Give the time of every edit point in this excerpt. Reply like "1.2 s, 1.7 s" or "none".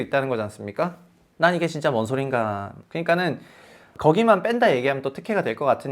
2.8 s, 3.9 s